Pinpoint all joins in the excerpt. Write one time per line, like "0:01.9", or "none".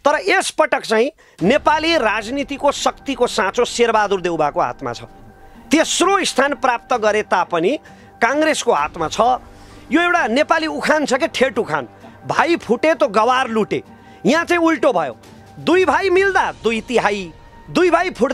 none